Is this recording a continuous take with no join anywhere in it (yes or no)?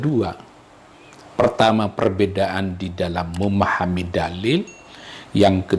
yes